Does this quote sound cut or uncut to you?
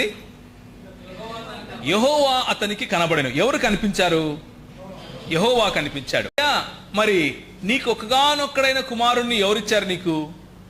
cut